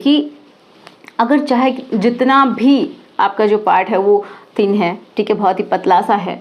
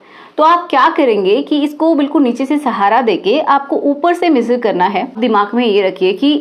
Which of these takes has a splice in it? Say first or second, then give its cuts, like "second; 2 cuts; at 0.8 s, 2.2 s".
second; 1 cut; at 5.1 s